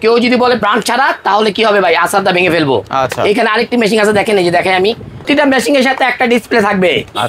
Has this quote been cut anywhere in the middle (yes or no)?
yes